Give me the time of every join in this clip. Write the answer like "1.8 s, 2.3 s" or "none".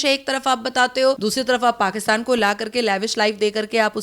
1.2 s